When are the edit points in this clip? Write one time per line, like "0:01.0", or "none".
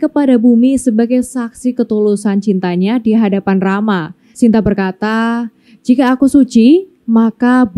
none

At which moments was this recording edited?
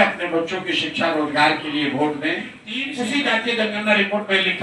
0:02.9

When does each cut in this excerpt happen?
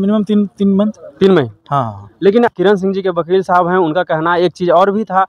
0:02.5

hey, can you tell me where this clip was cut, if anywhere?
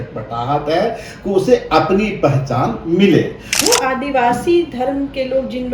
0:03.5

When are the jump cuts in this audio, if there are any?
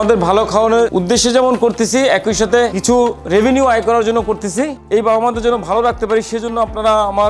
0:00.9
0:02.8
0:04.8

